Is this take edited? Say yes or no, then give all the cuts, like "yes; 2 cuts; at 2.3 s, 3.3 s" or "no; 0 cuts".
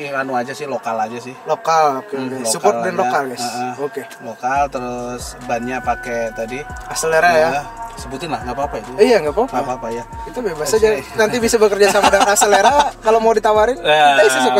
no; 0 cuts